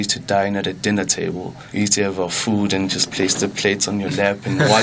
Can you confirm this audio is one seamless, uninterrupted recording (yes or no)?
no